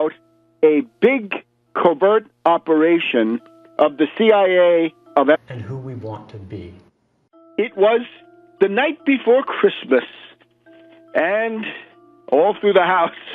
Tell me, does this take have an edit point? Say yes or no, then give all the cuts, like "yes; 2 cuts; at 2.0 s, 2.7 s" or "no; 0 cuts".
no; 0 cuts